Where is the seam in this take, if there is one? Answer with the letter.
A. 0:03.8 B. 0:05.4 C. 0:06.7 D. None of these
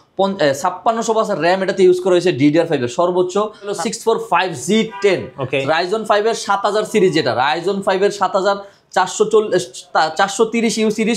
A